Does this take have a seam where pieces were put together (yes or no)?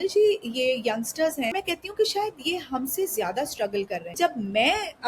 yes